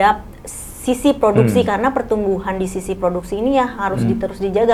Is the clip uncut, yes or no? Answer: yes